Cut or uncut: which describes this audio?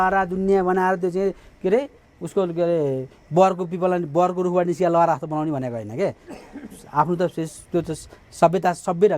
uncut